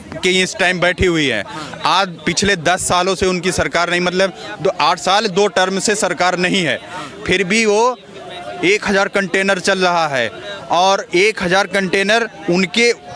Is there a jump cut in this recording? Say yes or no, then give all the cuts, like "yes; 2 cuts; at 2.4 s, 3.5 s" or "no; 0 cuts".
no; 0 cuts